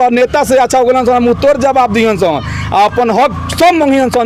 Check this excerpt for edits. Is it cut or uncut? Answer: uncut